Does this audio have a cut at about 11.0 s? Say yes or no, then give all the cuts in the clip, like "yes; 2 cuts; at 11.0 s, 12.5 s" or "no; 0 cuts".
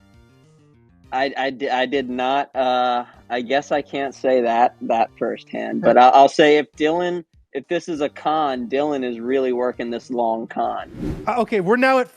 yes; 1 cut; at 11.0 s